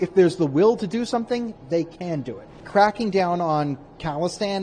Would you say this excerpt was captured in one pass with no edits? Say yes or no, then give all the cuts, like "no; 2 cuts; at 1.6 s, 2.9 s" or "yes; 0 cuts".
no; 1 cut; at 2.6 s